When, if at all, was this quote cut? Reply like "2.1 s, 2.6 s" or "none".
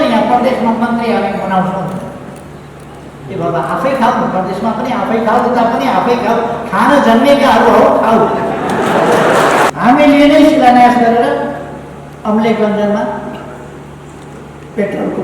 9.7 s